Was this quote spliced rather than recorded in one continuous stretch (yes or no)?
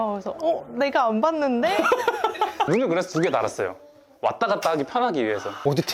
yes